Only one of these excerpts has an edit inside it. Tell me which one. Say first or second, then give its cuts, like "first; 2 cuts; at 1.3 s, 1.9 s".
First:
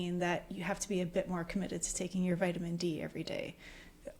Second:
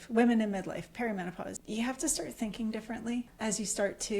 second; 2 cuts; at 1.6 s, 3.3 s